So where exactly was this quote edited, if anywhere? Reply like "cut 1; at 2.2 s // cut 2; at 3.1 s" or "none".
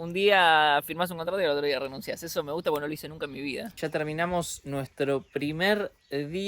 cut 1; at 3.8 s

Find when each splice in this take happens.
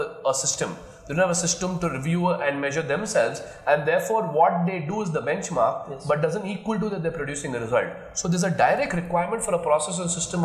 none

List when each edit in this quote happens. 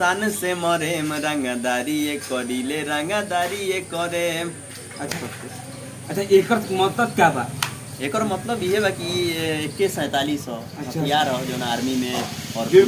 cut 1; at 5.1 s

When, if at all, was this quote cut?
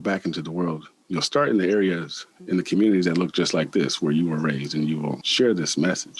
cut 1; at 5.2 s

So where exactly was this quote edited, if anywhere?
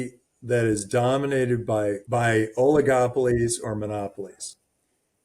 cut 1; at 2.0 s

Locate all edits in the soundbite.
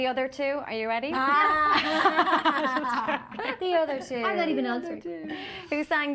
none

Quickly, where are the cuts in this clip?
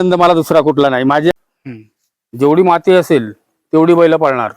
cut 1; at 1.3 s

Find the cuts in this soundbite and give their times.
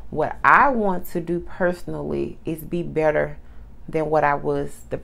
none

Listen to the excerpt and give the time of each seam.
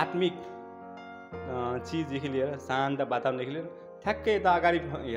none

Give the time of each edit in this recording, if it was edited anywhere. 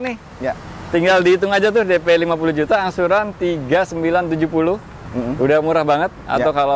none

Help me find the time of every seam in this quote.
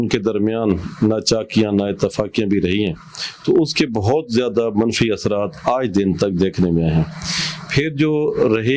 none

